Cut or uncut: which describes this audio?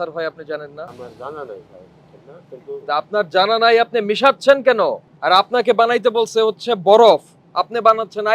cut